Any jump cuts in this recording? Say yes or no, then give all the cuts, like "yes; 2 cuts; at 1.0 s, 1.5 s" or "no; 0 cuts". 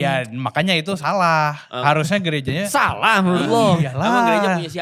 no; 0 cuts